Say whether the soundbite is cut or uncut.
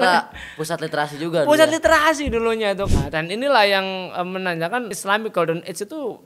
cut